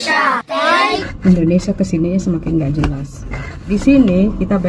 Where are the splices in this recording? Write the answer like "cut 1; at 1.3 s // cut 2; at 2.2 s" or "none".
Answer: cut 1; at 1.0 s // cut 2; at 3.5 s